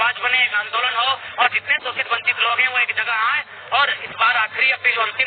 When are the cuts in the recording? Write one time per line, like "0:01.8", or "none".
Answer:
none